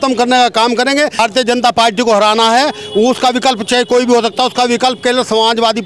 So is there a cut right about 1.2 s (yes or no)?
yes